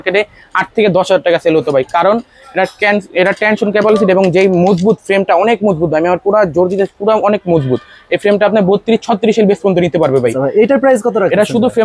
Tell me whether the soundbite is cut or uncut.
uncut